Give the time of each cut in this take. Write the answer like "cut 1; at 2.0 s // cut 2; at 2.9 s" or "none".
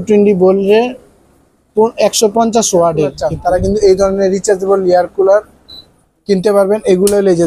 cut 1; at 3.3 s